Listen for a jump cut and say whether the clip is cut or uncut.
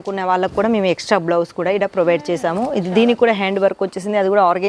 uncut